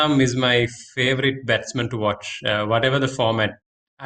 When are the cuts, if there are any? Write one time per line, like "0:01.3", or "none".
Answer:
none